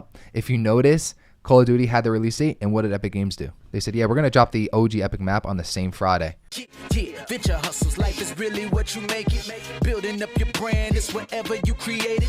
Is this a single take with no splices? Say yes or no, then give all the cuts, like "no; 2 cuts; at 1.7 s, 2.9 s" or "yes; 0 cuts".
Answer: no; 1 cut; at 6.4 s